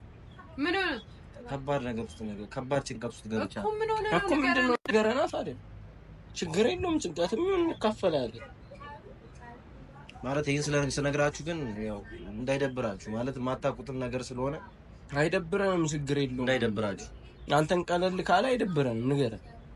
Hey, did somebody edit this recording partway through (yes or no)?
no